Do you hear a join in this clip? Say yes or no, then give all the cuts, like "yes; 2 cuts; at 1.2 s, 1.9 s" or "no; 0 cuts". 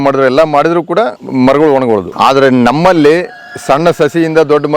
yes; 2 cuts; at 1.2 s, 2.1 s